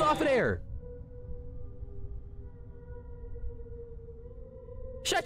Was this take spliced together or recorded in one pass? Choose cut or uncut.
uncut